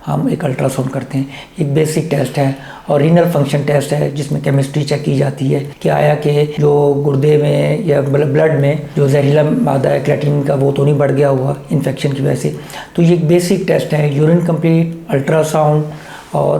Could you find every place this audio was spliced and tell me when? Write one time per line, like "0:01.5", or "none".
none